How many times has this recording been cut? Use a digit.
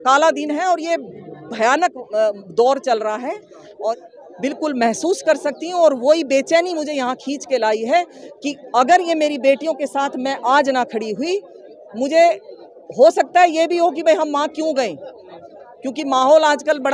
1